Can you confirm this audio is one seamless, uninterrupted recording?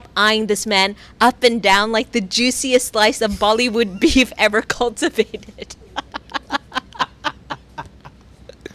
yes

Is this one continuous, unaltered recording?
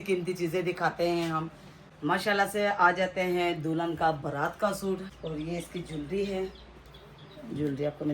no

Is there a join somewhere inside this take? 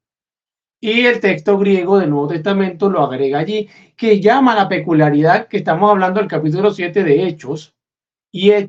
no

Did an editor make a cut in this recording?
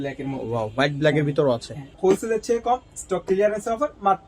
yes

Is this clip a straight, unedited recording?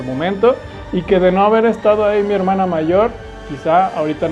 yes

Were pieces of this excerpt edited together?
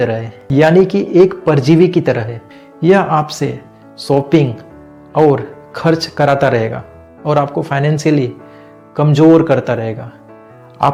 no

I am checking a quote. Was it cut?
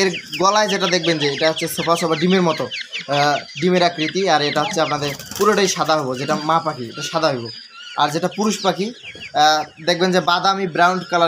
no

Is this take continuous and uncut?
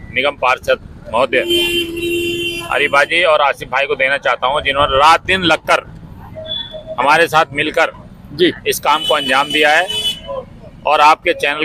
yes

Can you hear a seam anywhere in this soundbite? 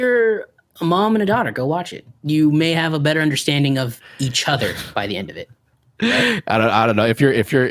yes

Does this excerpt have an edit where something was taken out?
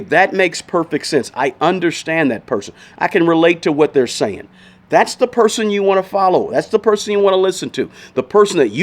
no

